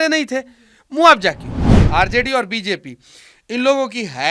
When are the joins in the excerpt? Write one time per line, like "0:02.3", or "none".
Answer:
0:01.7